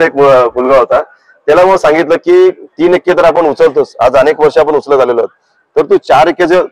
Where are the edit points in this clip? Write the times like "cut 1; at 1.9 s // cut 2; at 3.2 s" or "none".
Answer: none